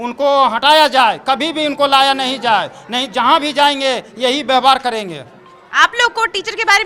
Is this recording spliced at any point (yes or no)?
no